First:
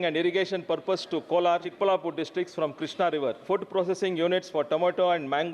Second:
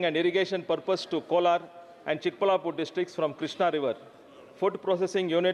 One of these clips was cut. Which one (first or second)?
first